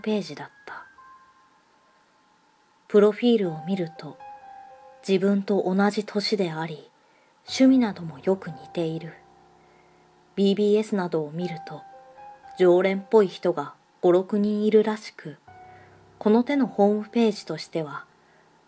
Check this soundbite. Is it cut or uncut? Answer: cut